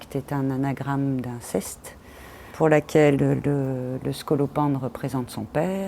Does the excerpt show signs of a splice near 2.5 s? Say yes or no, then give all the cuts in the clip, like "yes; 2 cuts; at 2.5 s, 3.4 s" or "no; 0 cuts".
yes; 1 cut; at 2.5 s